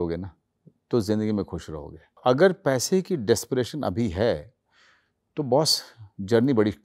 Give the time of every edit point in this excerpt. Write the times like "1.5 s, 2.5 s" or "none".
2.2 s